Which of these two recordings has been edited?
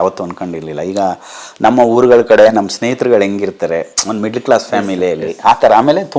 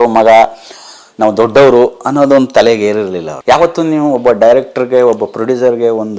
second; 1 cut; at 3.3 s

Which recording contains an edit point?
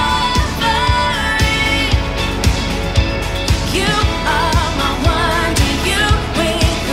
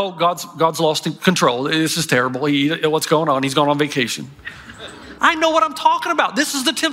second; 1 cut; at 4.8 s

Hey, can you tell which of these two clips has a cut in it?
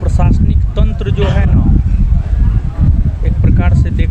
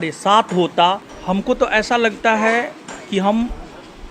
second; 1 cut; at 1.1 s

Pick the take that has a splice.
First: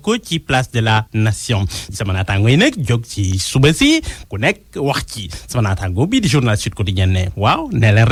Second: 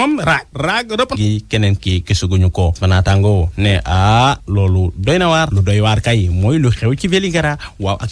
second; 1 cut; at 1.2 s

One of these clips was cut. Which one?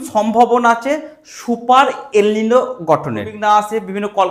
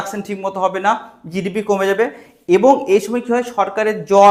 first; 1 cut; at 3.3 s

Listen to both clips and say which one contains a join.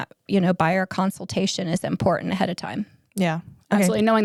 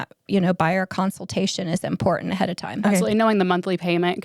second; 1 cut; at 2.8 s

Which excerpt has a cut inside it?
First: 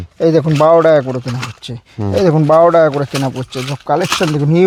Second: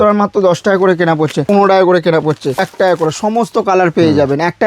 second; 2 cuts; at 1.5 s, 2.7 s

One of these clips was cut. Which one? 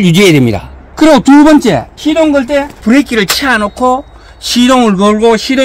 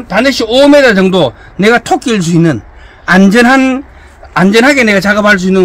first; 2 cuts; at 1.9 s, 2.8 s

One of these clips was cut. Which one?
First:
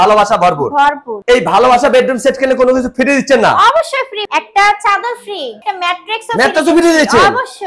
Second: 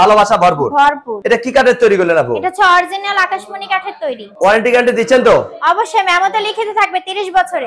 first; 3 cuts; at 1.1 s, 4.2 s, 5.7 s

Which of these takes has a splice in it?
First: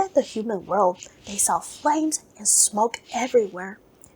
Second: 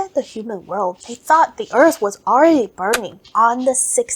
second; 2 cuts; at 1.1 s, 3.2 s

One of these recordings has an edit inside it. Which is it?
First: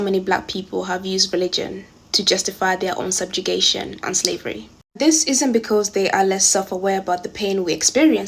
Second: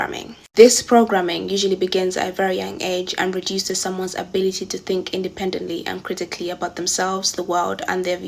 first; 1 cut; at 3.8 s

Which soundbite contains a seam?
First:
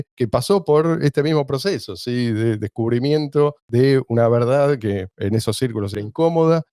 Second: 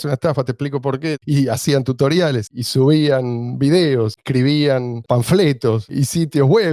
second; 4 cuts; at 1.2 s, 2.5 s, 4.2 s, 5.8 s

